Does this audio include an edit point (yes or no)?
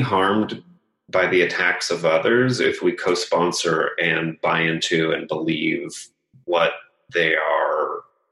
no